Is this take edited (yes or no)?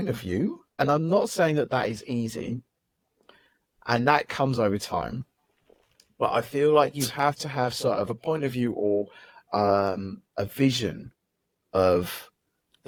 no